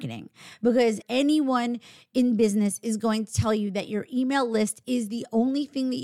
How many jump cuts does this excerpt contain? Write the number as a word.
one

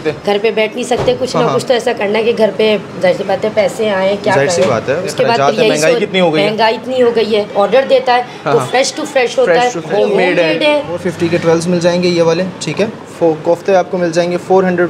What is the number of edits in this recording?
five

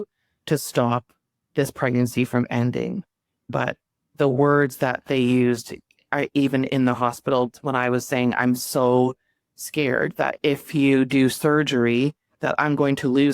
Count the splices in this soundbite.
one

